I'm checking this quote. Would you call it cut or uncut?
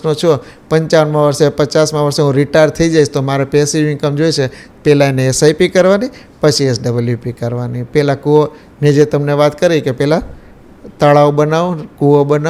uncut